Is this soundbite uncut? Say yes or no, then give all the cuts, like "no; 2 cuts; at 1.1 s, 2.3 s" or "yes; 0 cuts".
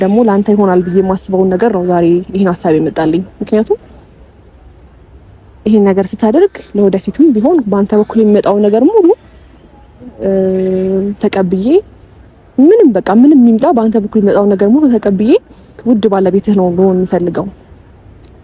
no; 1 cut; at 15.8 s